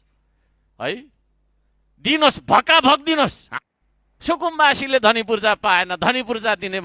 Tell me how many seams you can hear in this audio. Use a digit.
1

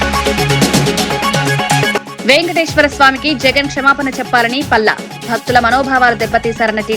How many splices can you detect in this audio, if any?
0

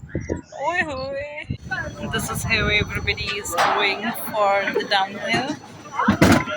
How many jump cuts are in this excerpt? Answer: 1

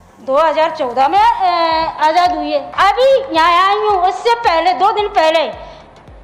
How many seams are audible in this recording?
1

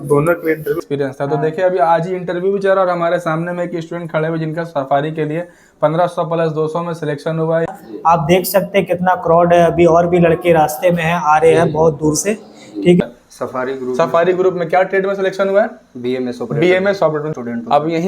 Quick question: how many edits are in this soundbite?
4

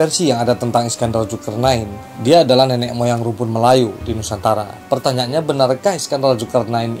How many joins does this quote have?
0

